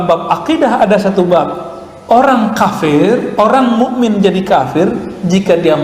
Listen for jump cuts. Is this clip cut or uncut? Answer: uncut